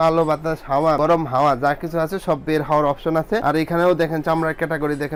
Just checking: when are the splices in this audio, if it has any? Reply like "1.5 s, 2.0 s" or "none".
none